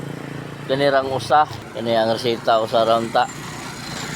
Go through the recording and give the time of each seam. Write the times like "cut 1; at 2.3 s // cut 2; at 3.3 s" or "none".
cut 1; at 1.6 s